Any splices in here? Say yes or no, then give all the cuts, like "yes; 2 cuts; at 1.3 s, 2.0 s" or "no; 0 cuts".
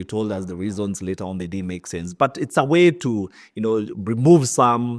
no; 0 cuts